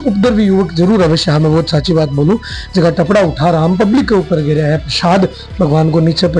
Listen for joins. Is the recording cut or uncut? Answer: uncut